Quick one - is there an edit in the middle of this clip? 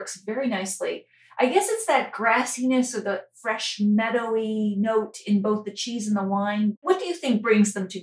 yes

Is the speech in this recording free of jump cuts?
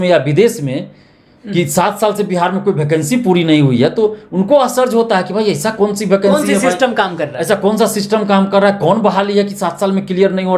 yes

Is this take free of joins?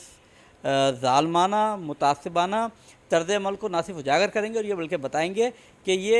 yes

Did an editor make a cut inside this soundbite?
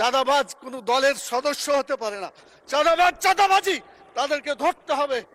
no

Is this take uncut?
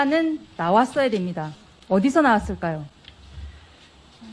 yes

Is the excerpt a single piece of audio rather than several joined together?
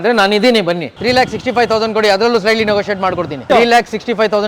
no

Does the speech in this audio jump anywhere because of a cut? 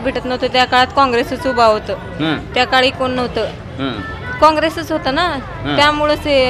no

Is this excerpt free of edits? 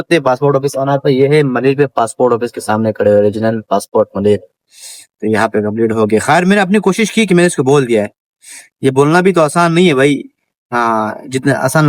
yes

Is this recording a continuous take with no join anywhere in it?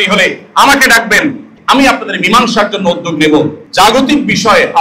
no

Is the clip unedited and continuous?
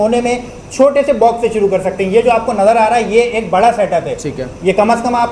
yes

